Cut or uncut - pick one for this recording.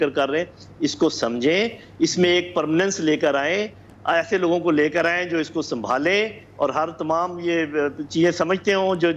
uncut